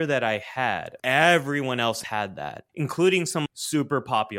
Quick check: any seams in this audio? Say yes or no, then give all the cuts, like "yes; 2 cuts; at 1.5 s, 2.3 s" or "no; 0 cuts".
yes; 3 cuts; at 0.9 s, 2.3 s, 3.5 s